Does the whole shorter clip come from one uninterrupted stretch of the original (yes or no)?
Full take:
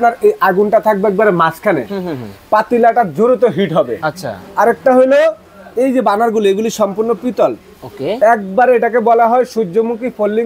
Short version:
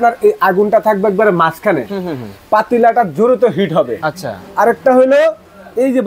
yes